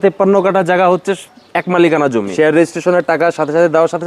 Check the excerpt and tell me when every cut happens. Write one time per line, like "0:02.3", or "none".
0:02.3